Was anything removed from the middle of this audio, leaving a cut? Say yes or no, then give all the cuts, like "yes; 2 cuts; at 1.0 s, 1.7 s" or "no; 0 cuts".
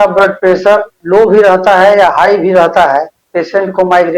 yes; 2 cuts; at 1.0 s, 3.2 s